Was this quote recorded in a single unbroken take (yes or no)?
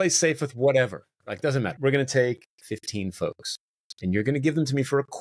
no